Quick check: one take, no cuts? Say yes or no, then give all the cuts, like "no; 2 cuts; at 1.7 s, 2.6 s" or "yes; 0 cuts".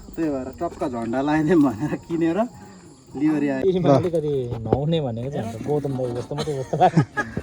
no; 1 cut; at 3.6 s